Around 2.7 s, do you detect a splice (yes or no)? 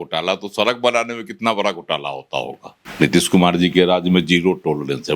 yes